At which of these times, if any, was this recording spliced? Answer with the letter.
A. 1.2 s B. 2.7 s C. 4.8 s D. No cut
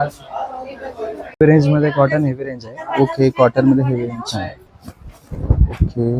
C